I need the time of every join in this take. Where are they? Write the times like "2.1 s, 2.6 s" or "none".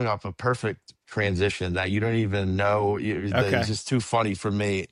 none